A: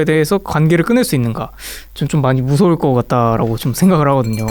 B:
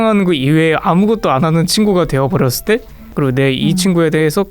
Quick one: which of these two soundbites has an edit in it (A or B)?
B